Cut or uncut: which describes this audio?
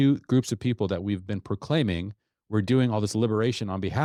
uncut